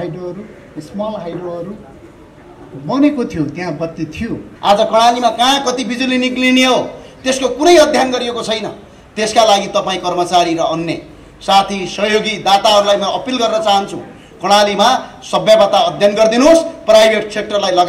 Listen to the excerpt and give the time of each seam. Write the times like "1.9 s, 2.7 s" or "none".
4.5 s

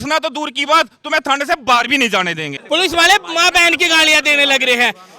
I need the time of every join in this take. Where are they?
2.5 s

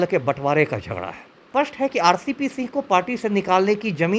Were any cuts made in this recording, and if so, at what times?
1.5 s

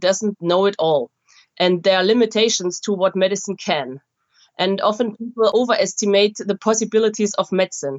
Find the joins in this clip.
5.5 s, 6.6 s

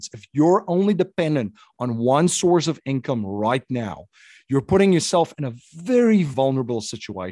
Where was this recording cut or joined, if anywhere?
6.3 s

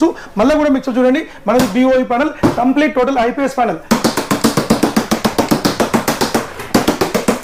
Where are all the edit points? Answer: none

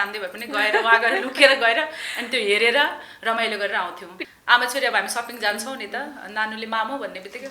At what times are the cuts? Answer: 4.1 s

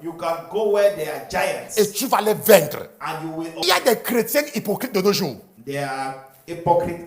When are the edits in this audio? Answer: 3.6 s

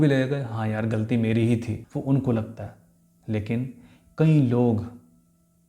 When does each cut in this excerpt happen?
1.8 s

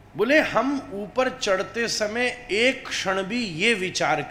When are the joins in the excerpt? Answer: none

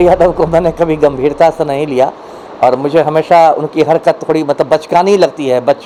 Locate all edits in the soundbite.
none

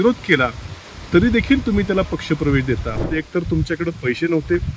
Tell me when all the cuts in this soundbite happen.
3.0 s

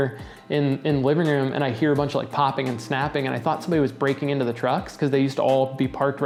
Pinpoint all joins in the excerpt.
none

